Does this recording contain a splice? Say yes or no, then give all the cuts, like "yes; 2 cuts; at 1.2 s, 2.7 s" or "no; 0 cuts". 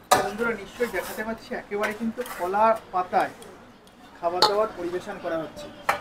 no; 0 cuts